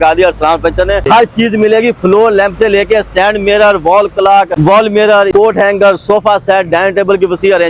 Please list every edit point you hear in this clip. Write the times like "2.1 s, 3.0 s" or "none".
1.0 s, 4.5 s, 5.3 s